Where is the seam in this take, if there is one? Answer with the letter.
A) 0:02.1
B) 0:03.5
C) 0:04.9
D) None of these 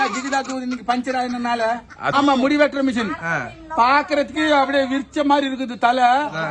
A